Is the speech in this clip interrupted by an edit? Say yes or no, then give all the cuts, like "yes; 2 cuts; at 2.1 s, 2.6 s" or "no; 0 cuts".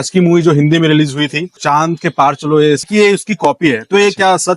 yes; 2 cuts; at 1.5 s, 2.8 s